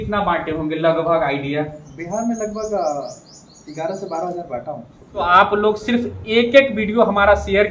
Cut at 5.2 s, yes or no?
yes